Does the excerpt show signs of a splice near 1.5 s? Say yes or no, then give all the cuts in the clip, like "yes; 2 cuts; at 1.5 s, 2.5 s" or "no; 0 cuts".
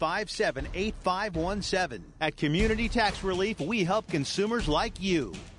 yes; 1 cut; at 1.5 s